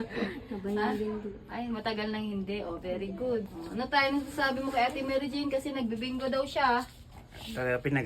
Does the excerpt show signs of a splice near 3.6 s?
yes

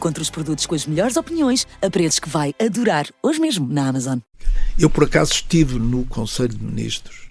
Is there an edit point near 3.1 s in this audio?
no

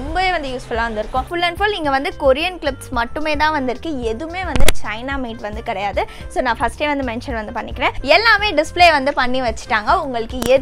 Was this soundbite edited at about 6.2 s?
no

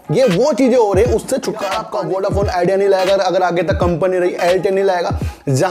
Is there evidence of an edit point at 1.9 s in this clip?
yes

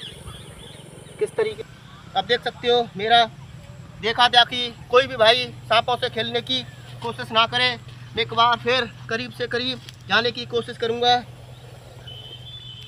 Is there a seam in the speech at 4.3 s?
no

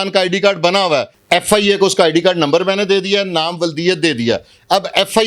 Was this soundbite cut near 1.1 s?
yes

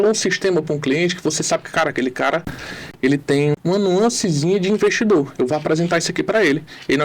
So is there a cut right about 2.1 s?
no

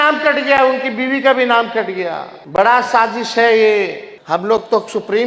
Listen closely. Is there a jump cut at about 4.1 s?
yes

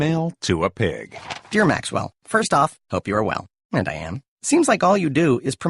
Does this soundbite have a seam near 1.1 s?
yes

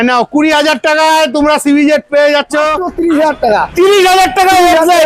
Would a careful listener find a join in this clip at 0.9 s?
no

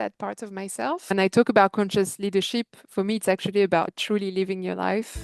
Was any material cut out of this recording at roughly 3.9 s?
yes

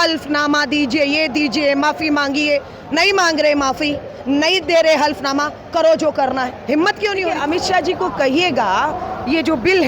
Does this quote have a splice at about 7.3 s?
yes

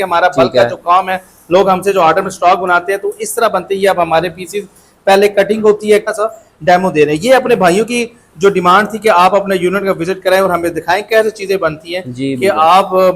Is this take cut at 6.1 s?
yes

